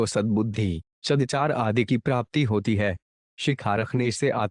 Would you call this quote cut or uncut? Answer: cut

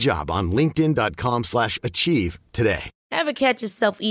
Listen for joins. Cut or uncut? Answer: cut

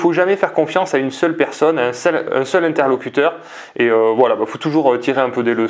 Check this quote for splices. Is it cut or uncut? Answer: uncut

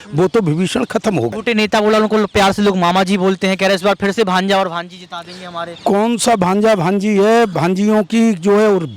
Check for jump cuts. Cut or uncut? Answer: cut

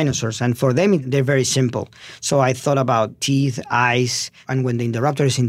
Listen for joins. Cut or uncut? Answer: cut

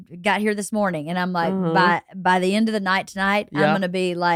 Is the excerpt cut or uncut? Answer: uncut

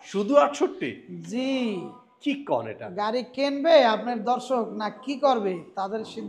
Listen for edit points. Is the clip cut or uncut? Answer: uncut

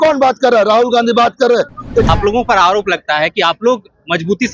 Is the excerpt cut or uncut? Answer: cut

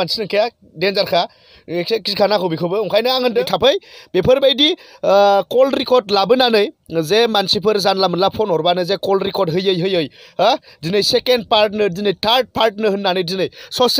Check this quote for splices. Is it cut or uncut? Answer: cut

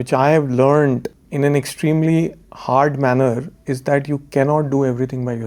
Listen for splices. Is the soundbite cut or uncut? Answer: uncut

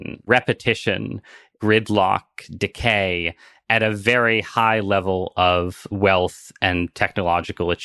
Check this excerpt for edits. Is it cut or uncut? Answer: uncut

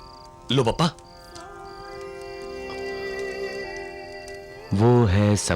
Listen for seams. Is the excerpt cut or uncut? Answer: uncut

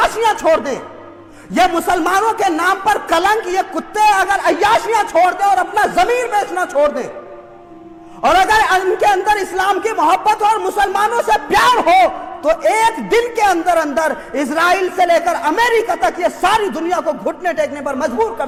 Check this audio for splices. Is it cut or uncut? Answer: uncut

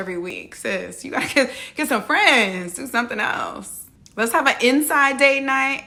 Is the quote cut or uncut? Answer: uncut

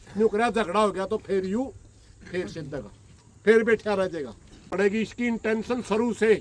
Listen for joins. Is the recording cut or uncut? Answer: cut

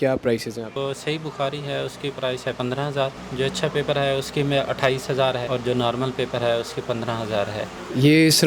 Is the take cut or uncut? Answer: uncut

